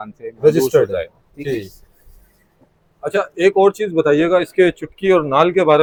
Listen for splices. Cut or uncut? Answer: uncut